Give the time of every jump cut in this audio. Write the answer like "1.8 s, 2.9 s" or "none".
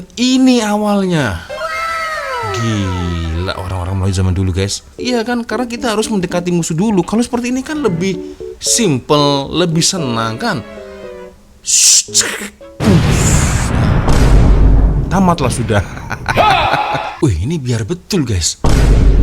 4.9 s, 17.1 s